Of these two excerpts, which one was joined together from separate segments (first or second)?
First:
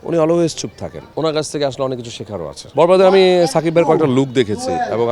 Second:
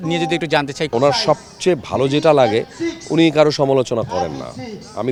first